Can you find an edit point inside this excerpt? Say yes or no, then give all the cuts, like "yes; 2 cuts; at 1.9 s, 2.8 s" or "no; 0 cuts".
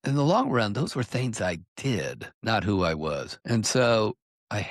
yes; 2 cuts; at 2.3 s, 3.3 s